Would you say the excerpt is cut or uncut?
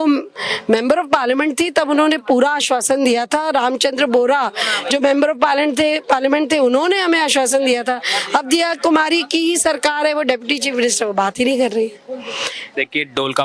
uncut